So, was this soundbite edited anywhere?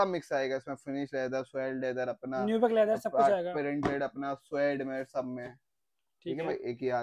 no; 0 cuts

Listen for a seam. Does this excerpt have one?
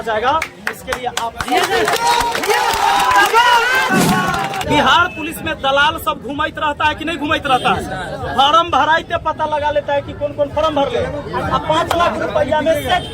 yes; 1 cut; at 4.6 s

